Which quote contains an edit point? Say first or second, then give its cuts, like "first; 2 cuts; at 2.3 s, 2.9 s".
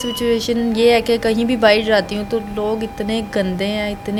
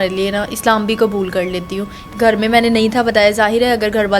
second; 1 cut; at 2.0 s